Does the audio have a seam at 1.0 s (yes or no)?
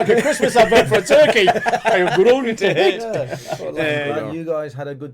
no